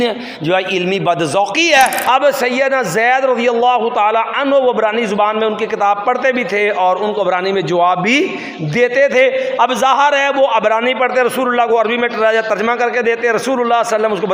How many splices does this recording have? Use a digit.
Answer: 1